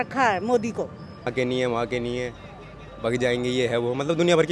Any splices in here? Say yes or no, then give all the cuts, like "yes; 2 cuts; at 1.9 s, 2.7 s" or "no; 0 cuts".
yes; 1 cut; at 1.3 s